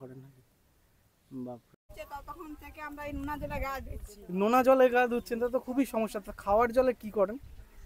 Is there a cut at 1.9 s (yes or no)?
yes